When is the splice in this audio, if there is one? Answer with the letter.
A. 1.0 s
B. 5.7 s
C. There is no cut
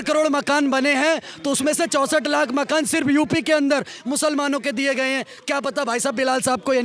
C